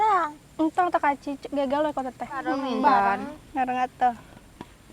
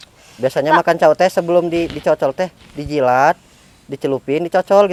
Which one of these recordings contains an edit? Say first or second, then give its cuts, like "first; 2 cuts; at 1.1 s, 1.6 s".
first; 1 cut; at 2.6 s